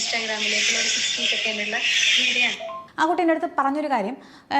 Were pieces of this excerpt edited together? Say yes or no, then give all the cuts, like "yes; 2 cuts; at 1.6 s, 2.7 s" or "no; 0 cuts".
yes; 1 cut; at 2.8 s